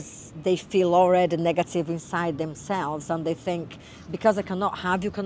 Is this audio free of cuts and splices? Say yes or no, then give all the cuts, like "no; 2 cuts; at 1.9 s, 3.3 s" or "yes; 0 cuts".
yes; 0 cuts